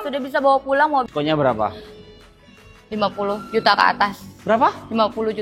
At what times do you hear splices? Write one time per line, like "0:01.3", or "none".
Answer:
0:01.1